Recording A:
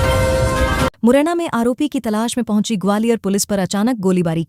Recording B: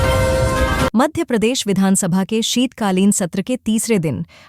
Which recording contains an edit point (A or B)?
B